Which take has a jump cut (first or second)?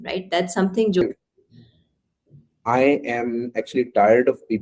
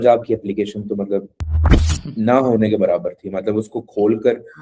first